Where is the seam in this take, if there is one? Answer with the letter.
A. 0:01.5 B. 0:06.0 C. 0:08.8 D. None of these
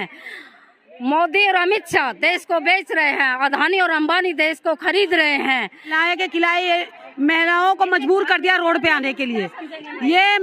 B